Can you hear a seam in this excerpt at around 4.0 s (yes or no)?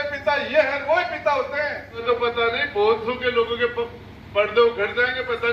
no